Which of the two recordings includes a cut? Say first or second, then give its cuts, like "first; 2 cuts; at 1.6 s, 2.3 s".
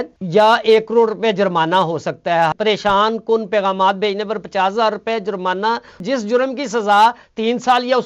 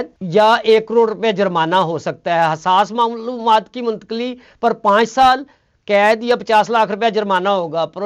first; 2 cuts; at 2.6 s, 6.0 s